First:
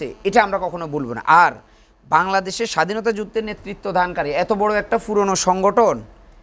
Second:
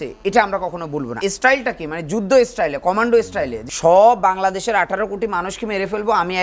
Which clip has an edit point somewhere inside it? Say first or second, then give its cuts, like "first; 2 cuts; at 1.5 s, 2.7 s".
second; 2 cuts; at 1.1 s, 3.6 s